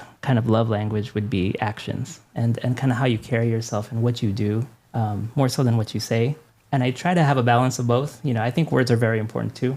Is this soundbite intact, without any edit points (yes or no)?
no